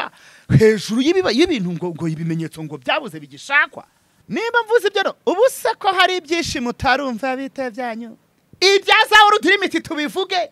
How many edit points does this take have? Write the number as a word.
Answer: one